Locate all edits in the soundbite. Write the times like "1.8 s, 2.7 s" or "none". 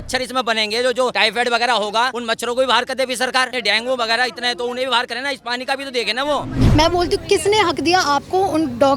1.1 s, 2.2 s, 3.5 s, 6.6 s